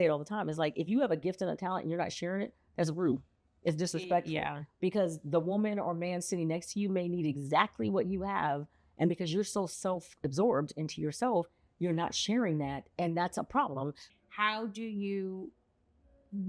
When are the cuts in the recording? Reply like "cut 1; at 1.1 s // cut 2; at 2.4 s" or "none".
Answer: cut 1; at 14.1 s